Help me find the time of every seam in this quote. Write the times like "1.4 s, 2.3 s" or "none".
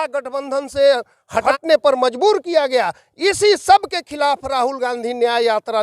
1.5 s